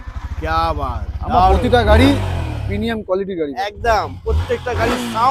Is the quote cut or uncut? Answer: uncut